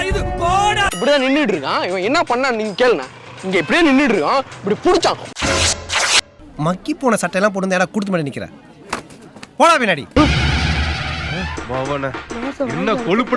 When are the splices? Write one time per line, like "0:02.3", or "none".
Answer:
0:00.9
0:10.1